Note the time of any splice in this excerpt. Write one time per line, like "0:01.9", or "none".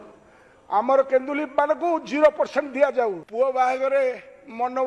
0:03.2